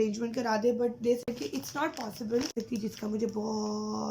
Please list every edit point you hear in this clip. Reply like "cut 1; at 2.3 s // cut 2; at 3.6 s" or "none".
cut 1; at 2.5 s